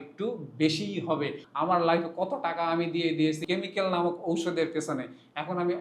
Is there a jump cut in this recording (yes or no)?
yes